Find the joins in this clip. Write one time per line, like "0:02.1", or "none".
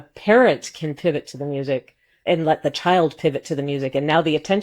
0:02.1